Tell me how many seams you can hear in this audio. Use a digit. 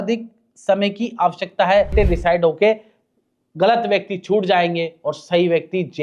1